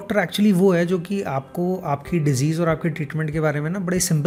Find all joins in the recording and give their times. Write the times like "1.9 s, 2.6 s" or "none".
none